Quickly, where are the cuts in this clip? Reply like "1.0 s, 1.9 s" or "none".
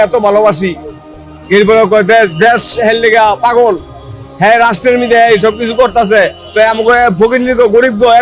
none